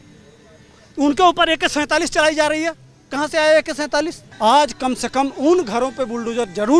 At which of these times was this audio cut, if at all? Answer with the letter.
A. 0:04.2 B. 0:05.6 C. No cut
A